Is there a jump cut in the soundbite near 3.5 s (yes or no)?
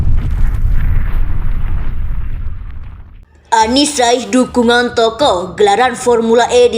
yes